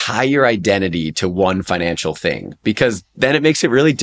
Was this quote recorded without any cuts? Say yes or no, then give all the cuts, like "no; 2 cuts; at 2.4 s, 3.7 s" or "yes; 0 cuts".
yes; 0 cuts